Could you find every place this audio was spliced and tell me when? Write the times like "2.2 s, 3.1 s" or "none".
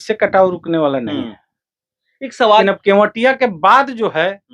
2.6 s